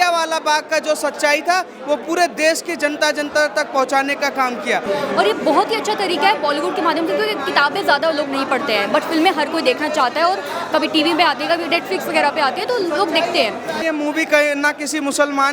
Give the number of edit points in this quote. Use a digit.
2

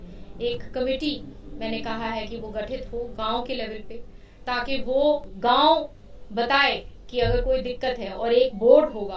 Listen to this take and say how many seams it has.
1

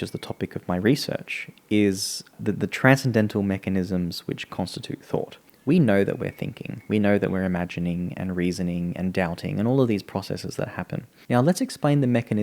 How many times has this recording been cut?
3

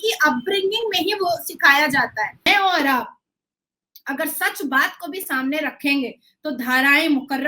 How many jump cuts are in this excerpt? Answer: 1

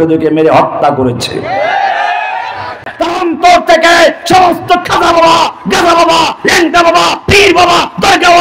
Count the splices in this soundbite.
1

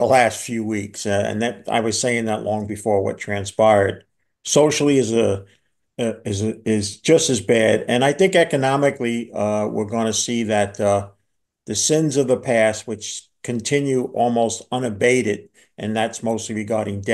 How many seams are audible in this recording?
0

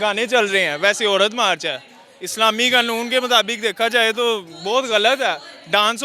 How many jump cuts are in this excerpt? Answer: 0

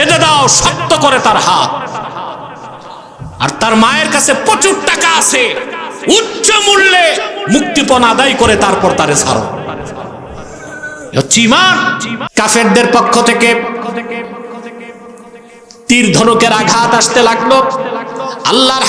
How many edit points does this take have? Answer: 1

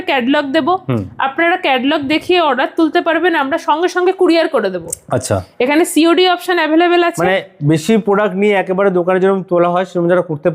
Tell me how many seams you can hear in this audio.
0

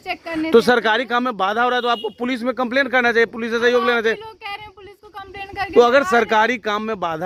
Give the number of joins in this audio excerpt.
0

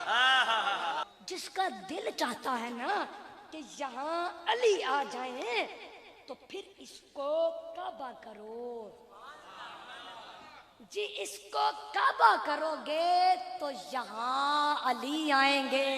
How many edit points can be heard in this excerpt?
1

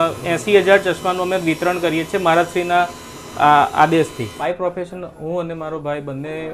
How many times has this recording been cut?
1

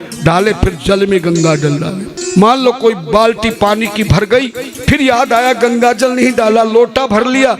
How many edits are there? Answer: 1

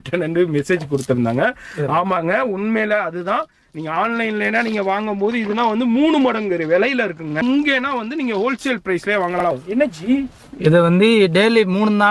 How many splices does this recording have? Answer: 2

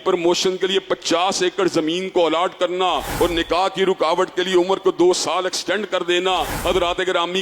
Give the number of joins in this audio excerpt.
2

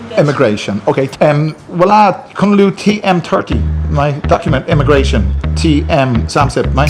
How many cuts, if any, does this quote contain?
1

